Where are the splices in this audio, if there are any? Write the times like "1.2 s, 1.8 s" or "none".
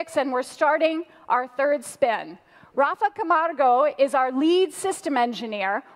none